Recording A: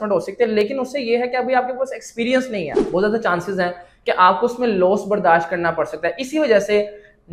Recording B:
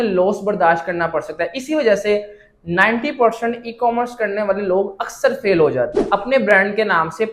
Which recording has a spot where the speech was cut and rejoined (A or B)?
B